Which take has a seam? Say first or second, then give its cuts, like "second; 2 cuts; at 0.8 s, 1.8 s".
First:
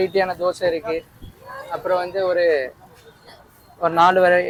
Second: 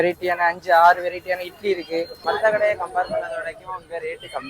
second; 1 cut; at 2.2 s